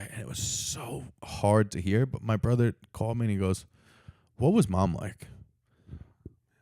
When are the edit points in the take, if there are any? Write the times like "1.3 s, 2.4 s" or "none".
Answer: 1.2 s